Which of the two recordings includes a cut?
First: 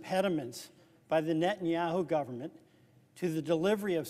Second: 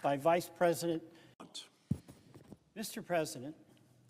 second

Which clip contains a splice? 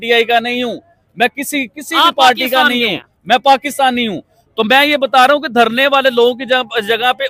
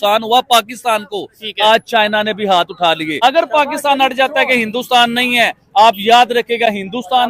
second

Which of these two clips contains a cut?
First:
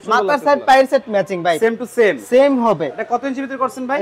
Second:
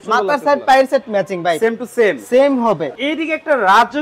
second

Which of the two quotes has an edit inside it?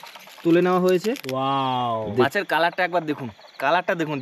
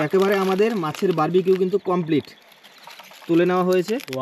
first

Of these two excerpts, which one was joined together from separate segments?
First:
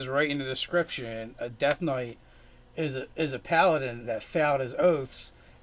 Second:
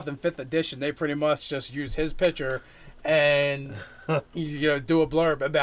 second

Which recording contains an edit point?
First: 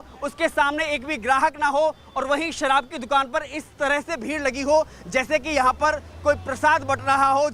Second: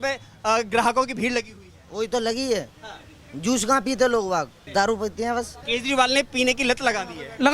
second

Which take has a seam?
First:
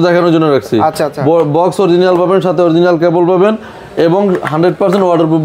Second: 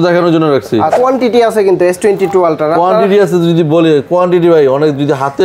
second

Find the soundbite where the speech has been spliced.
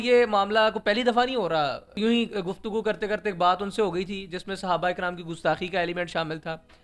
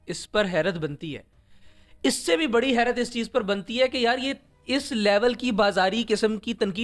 first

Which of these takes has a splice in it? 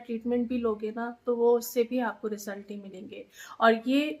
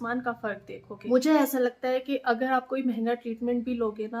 second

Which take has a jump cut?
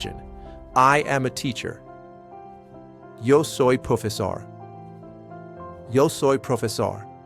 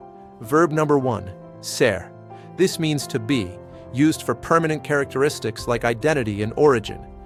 first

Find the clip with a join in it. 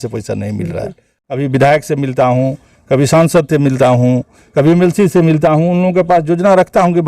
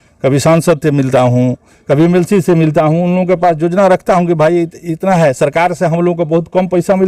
first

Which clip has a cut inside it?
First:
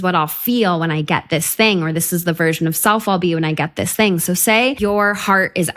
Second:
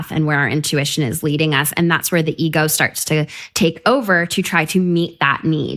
first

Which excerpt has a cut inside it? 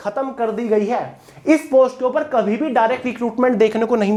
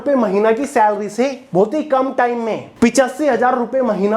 second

